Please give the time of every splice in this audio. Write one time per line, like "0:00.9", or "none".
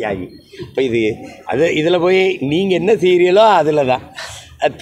none